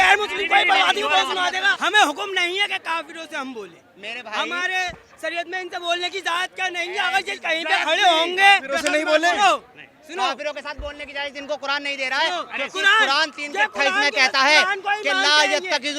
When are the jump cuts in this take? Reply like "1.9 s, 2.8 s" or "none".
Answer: 1.7 s